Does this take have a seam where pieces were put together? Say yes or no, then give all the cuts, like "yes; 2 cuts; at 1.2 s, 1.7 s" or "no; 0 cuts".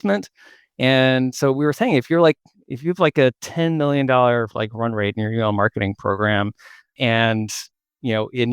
yes; 1 cut; at 6.9 s